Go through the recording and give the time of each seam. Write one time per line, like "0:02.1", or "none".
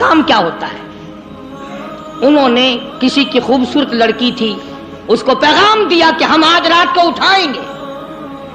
0:07.6